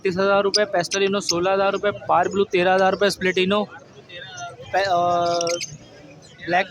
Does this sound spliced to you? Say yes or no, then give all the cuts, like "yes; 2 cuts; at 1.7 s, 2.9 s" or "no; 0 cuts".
no; 0 cuts